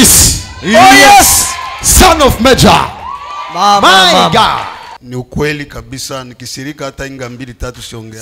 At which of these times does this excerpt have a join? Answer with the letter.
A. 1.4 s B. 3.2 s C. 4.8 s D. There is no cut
C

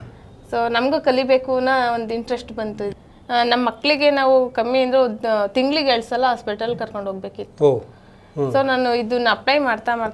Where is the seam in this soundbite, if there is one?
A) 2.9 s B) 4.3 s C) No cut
A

